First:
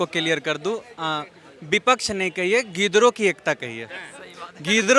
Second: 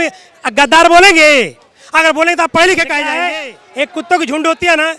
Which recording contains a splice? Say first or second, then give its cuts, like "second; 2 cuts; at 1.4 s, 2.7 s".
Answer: second; 1 cut; at 3.2 s